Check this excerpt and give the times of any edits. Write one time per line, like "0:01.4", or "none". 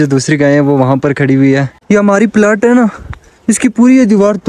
0:01.7